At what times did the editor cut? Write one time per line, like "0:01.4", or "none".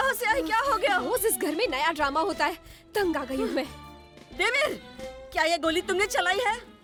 none